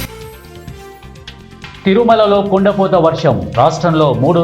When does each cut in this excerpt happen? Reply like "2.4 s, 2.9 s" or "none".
1.2 s